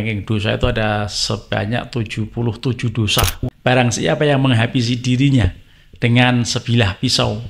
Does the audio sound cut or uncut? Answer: cut